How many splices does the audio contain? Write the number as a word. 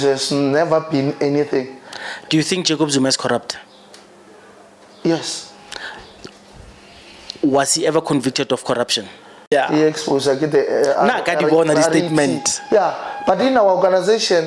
one